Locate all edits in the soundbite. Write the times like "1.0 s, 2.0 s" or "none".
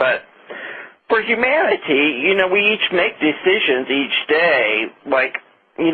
3.4 s

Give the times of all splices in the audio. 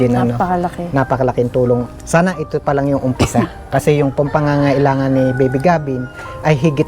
1.9 s

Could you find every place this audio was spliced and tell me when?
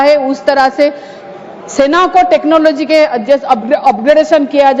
none

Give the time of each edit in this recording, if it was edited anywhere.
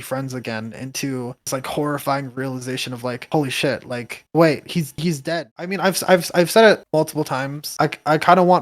5.2 s

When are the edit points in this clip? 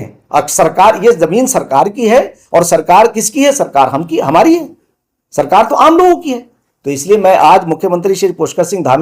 none

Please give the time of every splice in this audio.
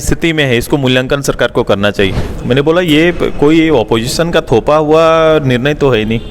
2.3 s

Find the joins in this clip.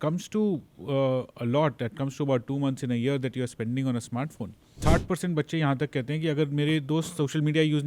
4.7 s

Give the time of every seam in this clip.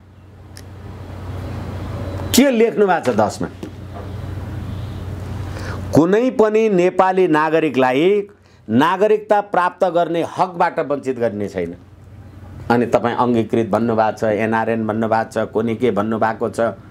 none

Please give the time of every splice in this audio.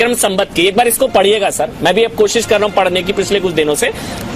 none

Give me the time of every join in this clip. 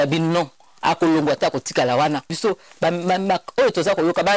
2.3 s

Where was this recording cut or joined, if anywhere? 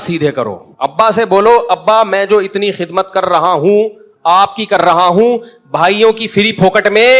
none

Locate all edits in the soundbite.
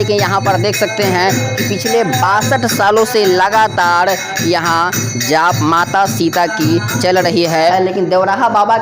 7.7 s

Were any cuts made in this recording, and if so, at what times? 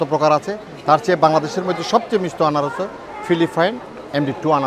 none

